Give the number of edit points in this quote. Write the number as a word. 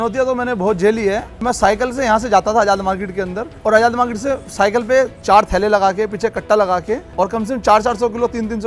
four